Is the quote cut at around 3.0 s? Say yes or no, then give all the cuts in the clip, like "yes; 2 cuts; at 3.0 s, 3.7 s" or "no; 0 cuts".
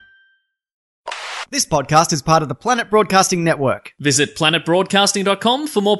no; 1 cut; at 1.2 s